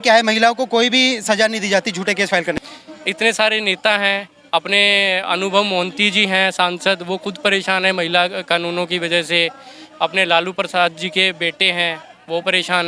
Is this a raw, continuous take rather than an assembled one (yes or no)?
no